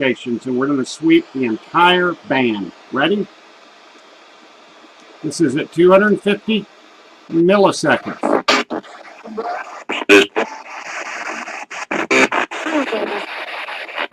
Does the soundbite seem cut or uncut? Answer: cut